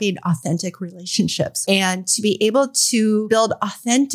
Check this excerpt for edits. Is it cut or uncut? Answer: cut